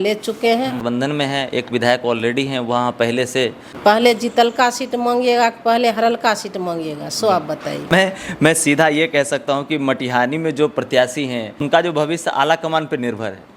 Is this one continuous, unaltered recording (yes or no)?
no